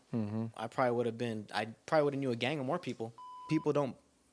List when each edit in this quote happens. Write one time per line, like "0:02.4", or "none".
0:03.4